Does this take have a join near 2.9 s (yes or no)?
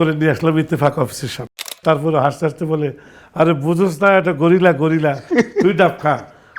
no